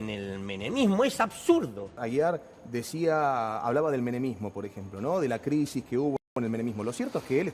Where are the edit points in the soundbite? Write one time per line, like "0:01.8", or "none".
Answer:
0:02.0